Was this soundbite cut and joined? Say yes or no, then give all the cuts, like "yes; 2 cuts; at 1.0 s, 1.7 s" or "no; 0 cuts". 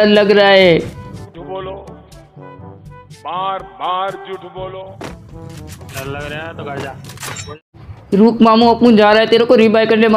yes; 1 cut; at 7.5 s